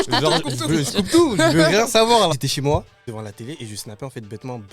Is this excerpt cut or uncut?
cut